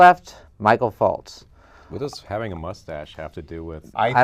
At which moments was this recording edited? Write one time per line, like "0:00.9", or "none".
0:01.2

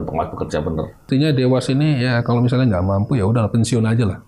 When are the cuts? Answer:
0:01.1

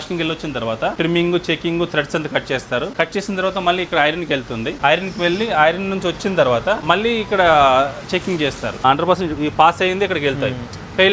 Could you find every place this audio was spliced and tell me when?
0:01.0
0:02.9
0:04.8
0:06.8
0:08.8

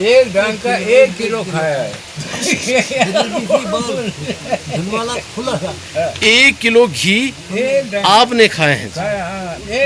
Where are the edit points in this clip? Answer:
none

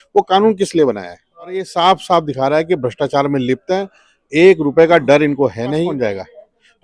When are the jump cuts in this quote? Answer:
0:01.7
0:05.9

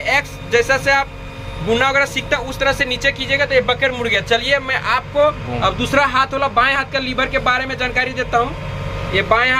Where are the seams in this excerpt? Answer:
none

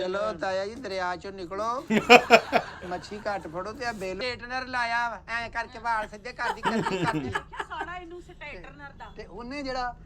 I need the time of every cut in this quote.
0:04.2

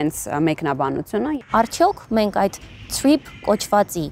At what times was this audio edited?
0:01.4

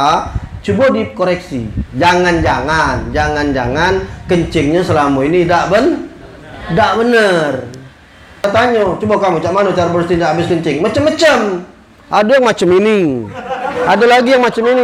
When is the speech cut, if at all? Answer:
0:08.4

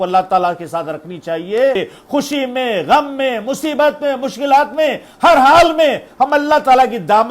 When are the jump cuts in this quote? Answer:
0:01.8

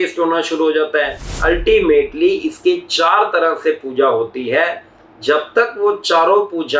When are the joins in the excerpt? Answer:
0:01.2

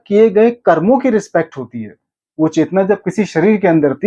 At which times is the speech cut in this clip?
none

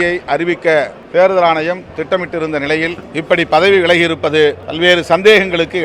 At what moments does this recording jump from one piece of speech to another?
0:01.0
0:03.0
0:04.7

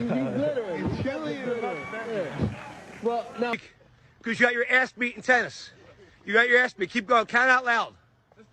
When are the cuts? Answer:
0:03.5

